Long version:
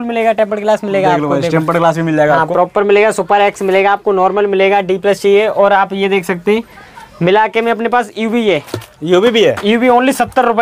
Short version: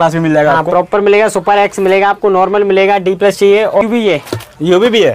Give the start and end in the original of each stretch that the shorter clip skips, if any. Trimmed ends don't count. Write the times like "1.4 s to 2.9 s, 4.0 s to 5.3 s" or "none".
5.6 s to 8.2 s